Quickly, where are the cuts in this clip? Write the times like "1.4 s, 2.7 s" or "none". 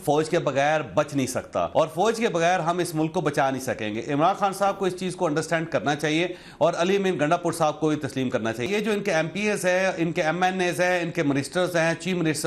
1.7 s, 8.7 s